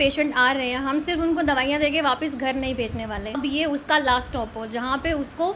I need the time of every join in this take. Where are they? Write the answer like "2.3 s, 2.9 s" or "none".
3.4 s